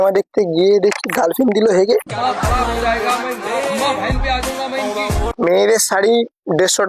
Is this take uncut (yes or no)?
no